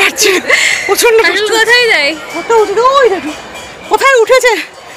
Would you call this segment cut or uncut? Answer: uncut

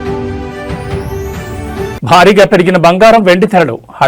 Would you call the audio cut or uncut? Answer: uncut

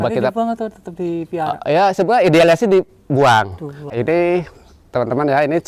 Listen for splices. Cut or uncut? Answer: cut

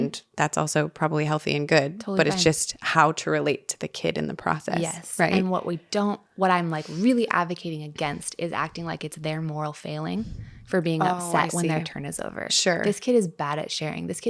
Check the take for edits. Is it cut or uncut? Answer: uncut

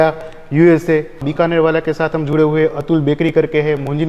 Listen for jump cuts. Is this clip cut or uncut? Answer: cut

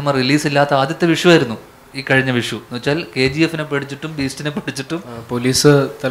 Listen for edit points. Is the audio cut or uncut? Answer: cut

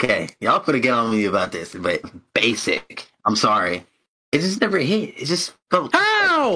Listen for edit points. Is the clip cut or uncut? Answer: cut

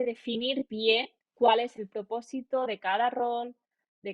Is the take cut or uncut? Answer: cut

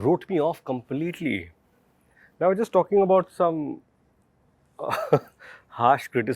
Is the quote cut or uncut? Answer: uncut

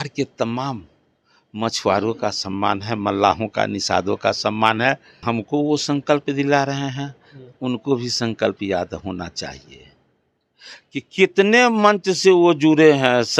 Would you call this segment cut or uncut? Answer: cut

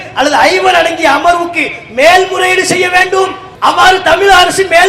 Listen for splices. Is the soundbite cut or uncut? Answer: cut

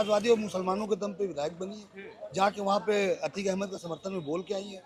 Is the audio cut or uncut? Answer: uncut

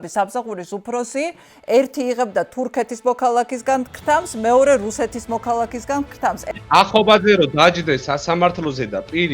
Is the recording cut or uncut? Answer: cut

